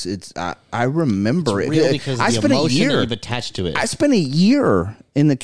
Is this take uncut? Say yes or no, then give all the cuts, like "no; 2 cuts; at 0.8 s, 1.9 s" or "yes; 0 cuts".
yes; 0 cuts